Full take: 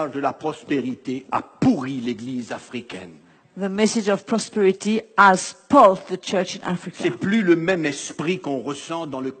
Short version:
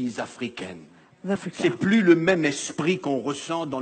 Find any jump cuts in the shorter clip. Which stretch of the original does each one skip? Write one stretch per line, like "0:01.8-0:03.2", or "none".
0:03.7-0:06.8